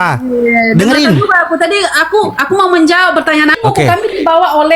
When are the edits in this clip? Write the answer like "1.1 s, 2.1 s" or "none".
3.6 s